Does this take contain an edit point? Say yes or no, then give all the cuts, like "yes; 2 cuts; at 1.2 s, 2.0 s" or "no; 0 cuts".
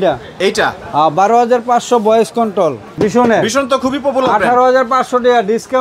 yes; 1 cut; at 2.9 s